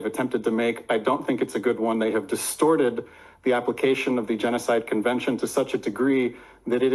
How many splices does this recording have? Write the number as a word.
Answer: zero